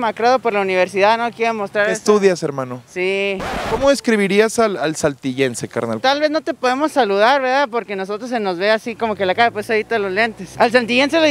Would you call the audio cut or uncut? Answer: uncut